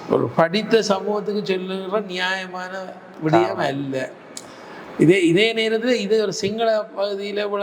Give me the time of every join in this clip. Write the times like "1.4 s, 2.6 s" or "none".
none